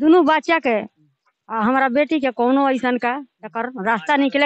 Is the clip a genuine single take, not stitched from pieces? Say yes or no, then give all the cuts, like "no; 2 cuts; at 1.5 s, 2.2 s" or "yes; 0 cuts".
yes; 0 cuts